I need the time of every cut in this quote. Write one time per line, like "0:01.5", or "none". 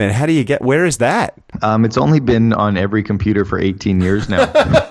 0:01.4